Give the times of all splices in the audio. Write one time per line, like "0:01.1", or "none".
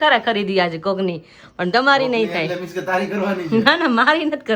none

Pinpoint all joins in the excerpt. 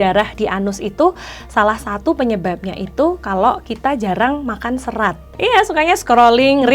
0:05.3

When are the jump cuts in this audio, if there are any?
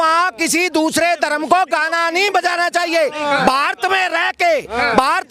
none

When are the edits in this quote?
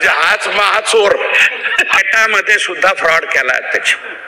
0:02.0

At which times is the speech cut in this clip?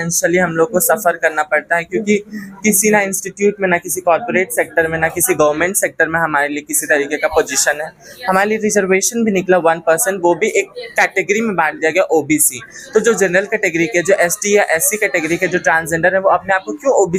none

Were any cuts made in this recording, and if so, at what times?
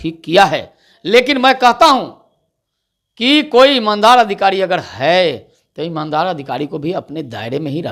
none

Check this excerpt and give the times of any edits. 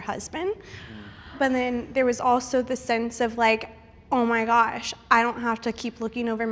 0:01.3

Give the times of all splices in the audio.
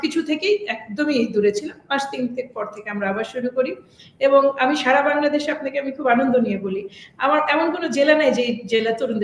none

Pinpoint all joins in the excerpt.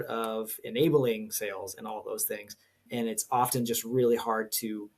0:02.9

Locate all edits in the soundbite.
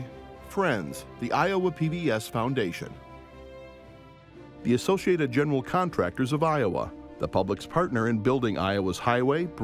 none

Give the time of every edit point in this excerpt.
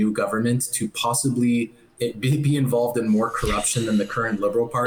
none

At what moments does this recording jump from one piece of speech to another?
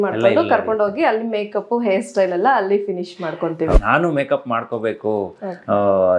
0:03.8

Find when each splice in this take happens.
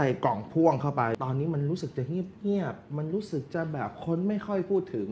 0:01.2

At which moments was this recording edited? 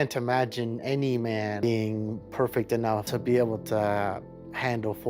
0:01.6
0:03.1

